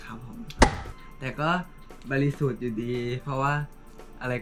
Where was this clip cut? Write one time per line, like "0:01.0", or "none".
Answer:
none